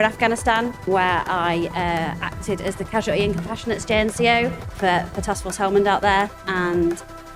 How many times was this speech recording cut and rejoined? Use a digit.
3